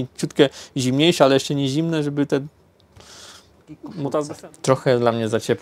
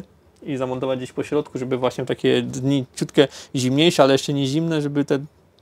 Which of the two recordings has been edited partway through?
first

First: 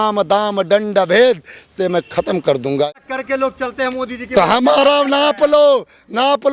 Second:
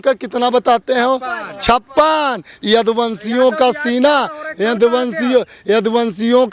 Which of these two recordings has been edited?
first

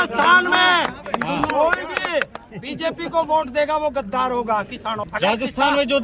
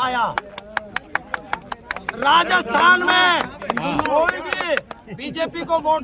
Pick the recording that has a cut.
first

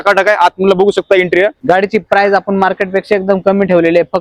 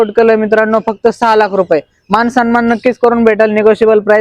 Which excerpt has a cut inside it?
first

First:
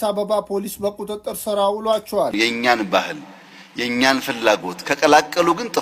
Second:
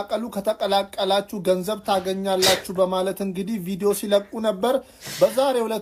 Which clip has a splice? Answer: first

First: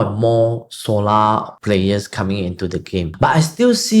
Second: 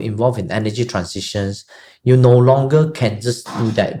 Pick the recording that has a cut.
first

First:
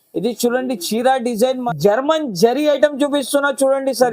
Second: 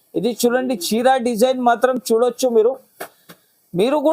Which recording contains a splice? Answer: first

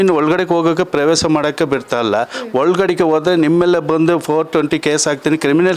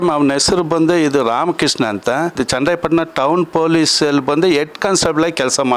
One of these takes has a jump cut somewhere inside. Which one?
second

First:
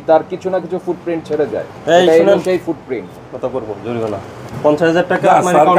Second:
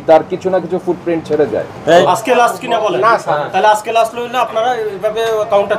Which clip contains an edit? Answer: second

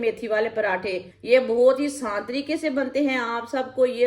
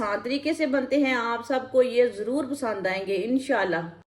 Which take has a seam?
first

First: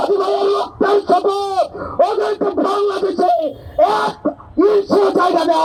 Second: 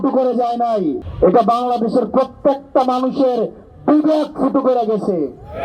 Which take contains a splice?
second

